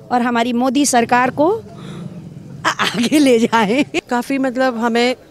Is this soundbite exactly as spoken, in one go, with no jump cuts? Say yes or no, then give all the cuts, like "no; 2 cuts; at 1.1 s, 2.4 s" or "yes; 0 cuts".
no; 1 cut; at 3.9 s